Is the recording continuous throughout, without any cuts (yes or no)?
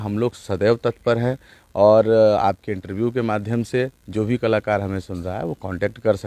yes